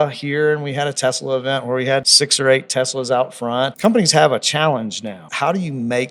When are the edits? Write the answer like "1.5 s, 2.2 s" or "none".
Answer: 2.1 s, 3.7 s, 5.2 s